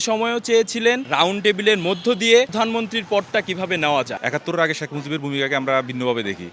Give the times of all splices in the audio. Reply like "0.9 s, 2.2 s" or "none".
1.0 s, 2.5 s, 4.2 s